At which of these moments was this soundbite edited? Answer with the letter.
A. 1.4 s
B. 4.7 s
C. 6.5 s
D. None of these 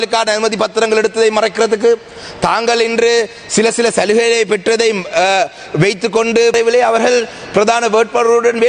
C